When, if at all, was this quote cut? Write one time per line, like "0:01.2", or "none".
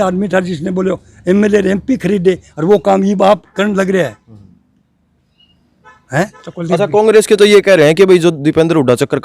0:06.4